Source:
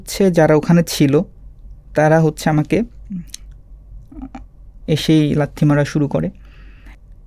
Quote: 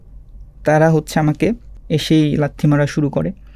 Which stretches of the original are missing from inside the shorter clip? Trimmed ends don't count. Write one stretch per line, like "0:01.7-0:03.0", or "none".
0:03.0-0:04.7